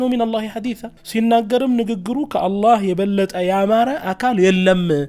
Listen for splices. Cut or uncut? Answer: cut